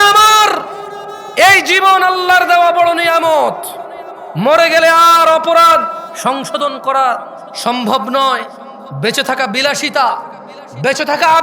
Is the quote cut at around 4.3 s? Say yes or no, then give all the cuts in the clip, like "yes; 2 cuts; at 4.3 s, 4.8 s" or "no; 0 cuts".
no; 1 cut; at 6.1 s